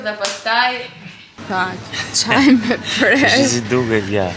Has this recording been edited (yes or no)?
yes